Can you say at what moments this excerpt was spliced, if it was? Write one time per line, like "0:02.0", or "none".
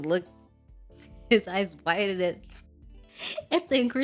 none